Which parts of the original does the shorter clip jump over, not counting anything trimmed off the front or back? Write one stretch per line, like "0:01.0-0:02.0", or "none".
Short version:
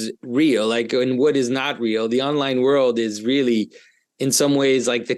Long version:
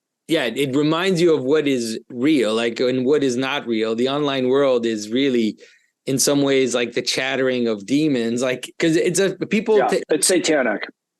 none